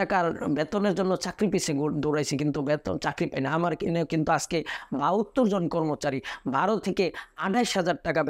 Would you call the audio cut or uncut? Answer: uncut